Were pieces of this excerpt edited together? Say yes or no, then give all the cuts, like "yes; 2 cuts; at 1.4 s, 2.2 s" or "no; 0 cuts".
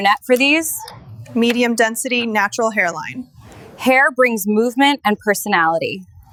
no; 0 cuts